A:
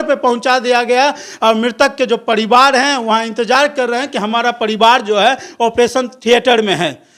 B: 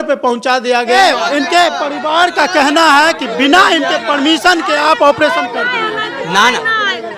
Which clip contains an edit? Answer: B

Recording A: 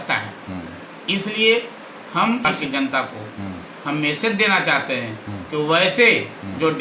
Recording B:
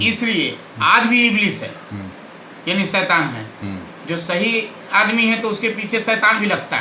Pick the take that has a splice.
A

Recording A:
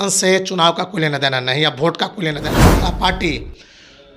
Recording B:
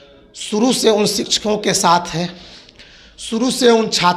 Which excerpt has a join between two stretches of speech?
A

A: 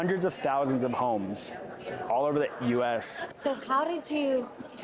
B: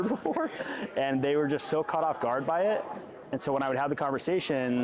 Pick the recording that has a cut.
A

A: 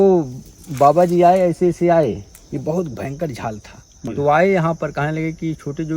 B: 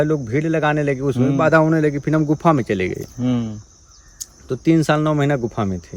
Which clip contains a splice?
A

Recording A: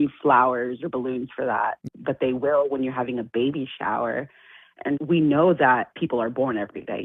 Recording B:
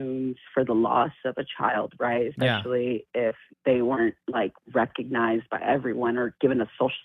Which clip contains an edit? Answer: A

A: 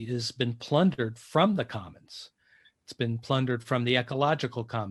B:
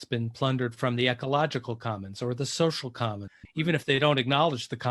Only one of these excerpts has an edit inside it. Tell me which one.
B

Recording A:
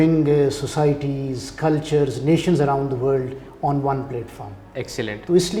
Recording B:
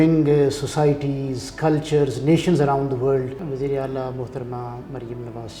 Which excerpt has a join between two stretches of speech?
B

